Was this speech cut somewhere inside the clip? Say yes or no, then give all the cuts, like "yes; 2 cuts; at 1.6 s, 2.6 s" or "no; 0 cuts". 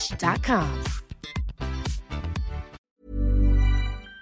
yes; 1 cut; at 2.8 s